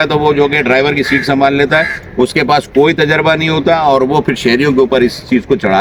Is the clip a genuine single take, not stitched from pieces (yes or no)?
yes